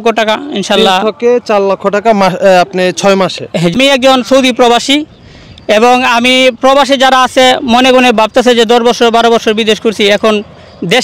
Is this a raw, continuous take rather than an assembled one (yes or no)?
no